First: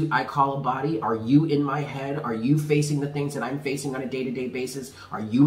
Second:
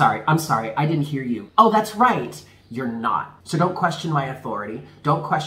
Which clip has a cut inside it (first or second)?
second